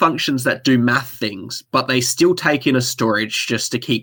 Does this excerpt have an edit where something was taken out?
no; 0 cuts

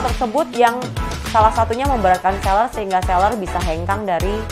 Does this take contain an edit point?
no; 0 cuts

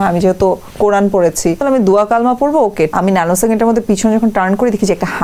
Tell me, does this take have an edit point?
yes; 2 cuts; at 1.6 s, 2.9 s

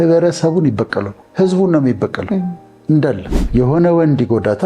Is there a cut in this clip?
yes; 1 cut; at 3.4 s

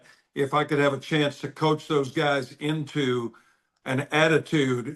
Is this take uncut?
yes; 0 cuts

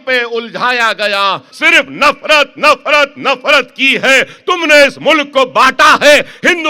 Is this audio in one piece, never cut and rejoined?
no; 1 cut; at 1.5 s

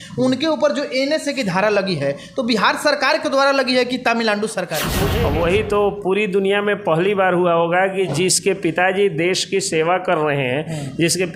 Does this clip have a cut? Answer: yes; 1 cut; at 5.0 s

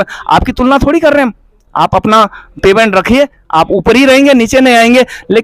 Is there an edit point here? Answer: no; 0 cuts

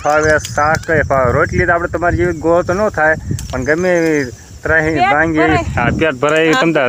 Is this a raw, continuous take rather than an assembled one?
yes; 0 cuts

